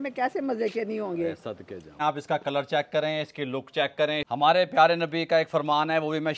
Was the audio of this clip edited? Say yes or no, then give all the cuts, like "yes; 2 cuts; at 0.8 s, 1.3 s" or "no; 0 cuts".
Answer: yes; 2 cuts; at 2.0 s, 4.2 s